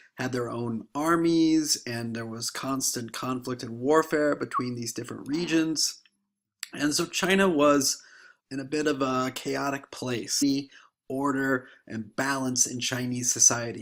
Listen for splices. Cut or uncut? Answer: uncut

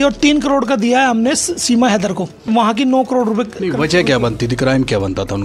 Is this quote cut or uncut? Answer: cut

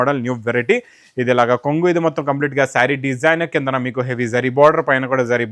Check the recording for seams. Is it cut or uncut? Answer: uncut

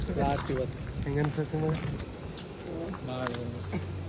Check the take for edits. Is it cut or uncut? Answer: uncut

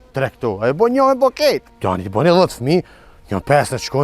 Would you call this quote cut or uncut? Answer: cut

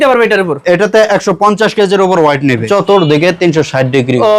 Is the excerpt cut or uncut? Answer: cut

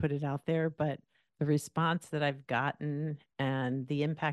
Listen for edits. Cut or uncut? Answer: uncut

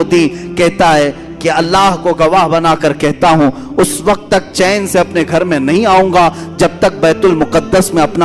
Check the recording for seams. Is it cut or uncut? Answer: uncut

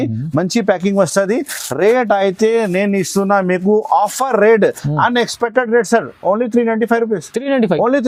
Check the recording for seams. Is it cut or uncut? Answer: uncut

